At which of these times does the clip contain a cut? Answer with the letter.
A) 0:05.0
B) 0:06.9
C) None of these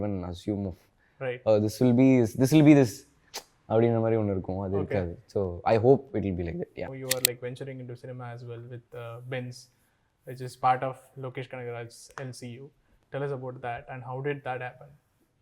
B